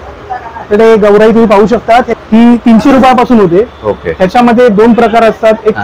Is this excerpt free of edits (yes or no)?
no